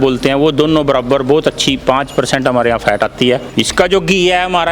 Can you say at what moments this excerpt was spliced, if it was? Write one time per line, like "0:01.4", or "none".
0:03.5